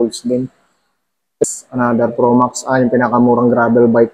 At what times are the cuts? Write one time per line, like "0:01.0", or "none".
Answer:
0:01.4

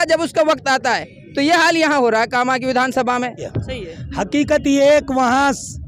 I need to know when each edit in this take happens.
0:03.5

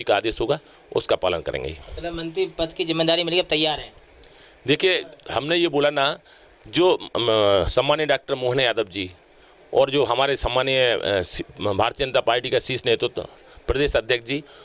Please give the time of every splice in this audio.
none

